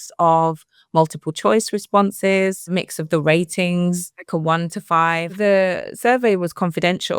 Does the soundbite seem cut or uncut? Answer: cut